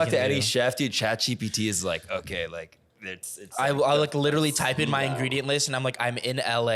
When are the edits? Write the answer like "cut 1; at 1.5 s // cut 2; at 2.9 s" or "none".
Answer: none